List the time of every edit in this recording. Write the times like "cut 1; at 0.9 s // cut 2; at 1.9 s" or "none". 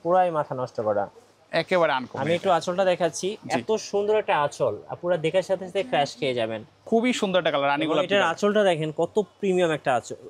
cut 1; at 6.7 s